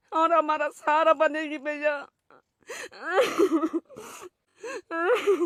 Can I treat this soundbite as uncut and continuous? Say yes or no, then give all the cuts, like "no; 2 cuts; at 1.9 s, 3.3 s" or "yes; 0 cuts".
yes; 0 cuts